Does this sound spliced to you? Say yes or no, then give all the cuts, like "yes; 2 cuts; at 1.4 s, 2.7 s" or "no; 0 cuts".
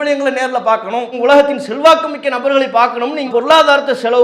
yes; 2 cuts; at 1.1 s, 3.3 s